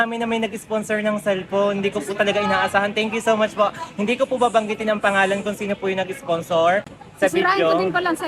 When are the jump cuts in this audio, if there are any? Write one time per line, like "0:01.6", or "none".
none